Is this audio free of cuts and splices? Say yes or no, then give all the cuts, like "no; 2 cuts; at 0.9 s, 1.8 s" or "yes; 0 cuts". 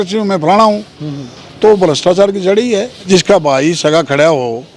no; 1 cut; at 3.1 s